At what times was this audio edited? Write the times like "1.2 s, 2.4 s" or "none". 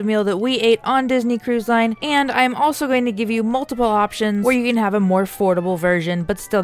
2.0 s, 4.4 s